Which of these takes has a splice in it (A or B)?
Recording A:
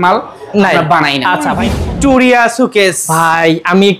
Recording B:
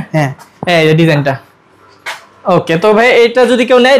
A